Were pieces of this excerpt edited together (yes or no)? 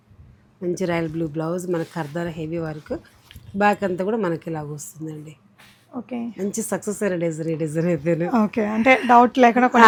no